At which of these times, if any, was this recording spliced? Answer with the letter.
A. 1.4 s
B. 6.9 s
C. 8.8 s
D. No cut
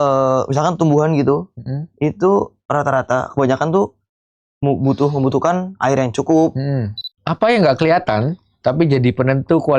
B